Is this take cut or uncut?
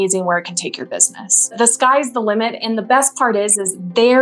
cut